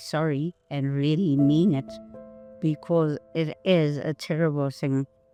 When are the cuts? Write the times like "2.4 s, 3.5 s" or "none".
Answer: none